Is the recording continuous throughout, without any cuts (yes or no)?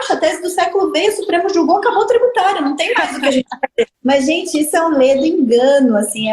no